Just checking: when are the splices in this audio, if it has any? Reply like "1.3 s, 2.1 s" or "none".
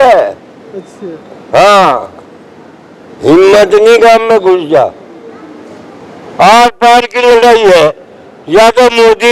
none